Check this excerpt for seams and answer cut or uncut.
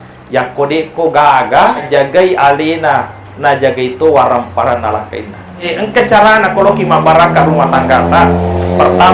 cut